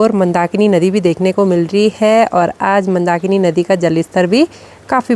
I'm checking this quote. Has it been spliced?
no; 0 cuts

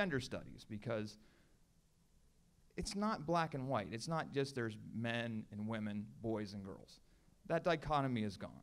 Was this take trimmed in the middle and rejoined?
yes; 1 cut; at 2.9 s

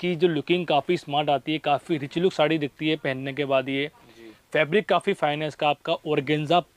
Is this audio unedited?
yes; 0 cuts

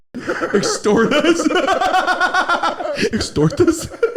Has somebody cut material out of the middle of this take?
yes; 1 cut; at 3.1 s

